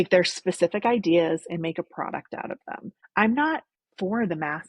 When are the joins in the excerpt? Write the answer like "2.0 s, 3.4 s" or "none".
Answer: 3.0 s, 3.8 s